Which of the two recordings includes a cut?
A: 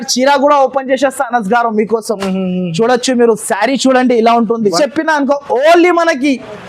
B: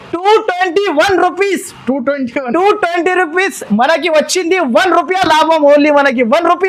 A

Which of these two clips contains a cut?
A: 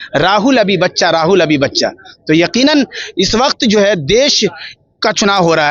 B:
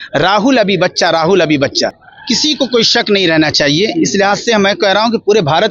B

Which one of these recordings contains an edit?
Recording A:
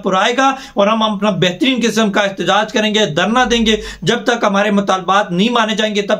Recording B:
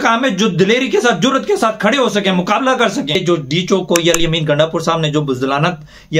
B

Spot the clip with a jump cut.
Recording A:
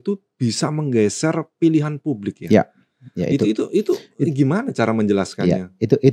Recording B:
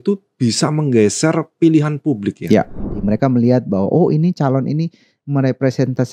B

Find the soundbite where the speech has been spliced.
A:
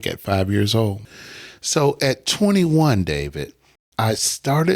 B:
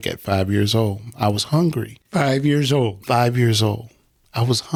A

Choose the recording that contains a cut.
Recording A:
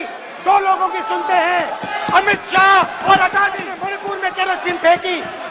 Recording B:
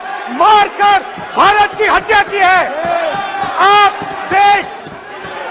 A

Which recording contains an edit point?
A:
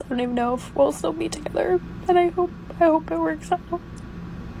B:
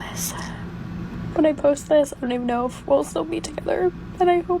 B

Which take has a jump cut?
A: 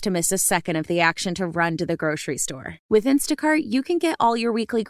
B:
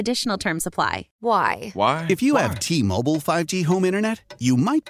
B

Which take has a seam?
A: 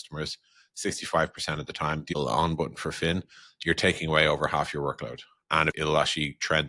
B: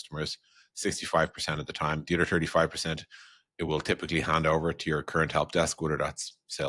A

